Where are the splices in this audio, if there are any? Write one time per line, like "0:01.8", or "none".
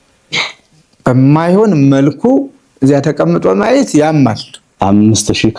0:04.6